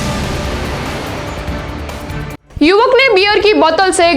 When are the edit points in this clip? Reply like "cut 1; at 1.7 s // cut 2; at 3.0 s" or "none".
cut 1; at 2.4 s